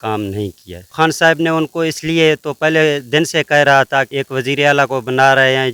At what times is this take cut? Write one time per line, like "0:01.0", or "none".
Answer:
0:00.9
0:04.1